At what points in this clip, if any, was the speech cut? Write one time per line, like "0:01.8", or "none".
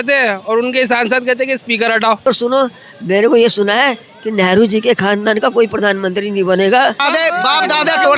0:02.3
0:07.0